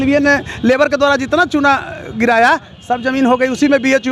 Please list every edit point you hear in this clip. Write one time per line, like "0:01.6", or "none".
none